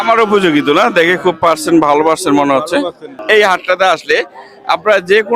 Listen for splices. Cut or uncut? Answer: cut